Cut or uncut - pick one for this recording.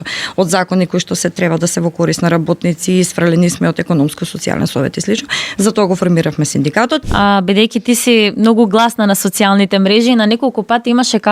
cut